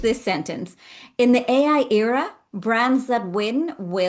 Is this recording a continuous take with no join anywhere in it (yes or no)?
yes